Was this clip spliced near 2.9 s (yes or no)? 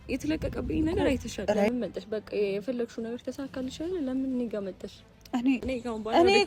no